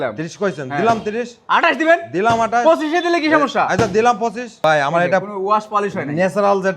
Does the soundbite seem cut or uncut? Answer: cut